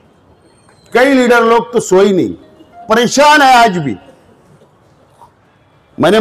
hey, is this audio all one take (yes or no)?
yes